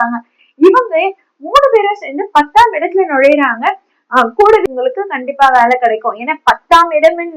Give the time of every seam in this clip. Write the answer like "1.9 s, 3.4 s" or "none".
4.6 s